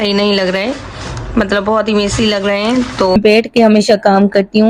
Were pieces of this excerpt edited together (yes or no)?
yes